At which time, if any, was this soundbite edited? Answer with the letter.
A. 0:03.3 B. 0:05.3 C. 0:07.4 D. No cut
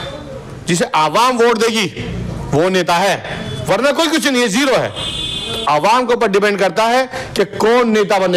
D